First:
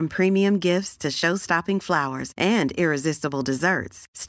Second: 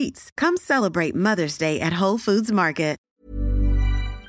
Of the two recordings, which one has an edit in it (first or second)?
second